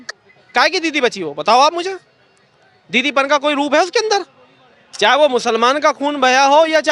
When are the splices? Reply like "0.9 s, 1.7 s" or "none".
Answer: none